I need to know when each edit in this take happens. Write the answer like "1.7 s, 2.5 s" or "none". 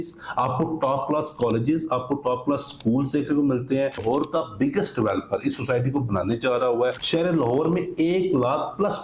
4.0 s, 7.0 s